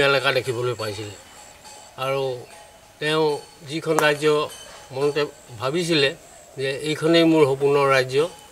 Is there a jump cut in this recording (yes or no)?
no